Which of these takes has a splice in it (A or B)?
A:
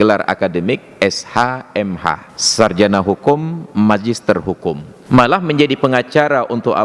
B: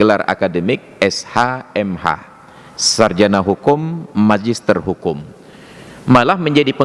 A